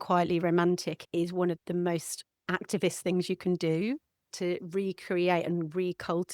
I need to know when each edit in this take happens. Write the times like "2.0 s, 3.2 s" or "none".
1.4 s, 4.3 s